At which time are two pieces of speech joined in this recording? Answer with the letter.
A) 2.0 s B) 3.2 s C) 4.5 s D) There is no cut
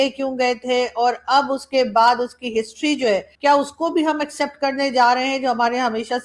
D